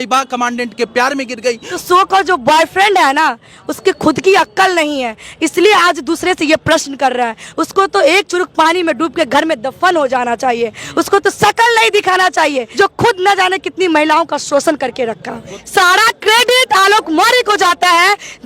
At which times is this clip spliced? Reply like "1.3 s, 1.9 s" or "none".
1.7 s, 12.6 s, 15.5 s